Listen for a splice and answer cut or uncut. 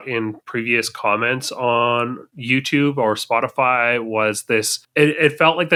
uncut